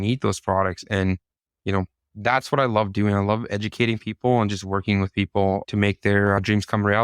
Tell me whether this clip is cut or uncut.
uncut